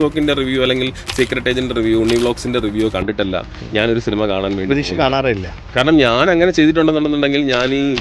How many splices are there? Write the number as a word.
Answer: one